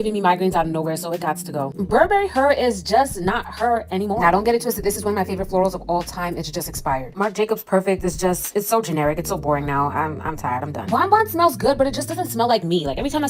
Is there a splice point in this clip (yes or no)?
no